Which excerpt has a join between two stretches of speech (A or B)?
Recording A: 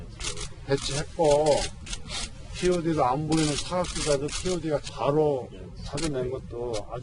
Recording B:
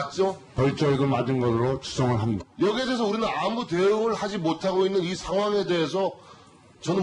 A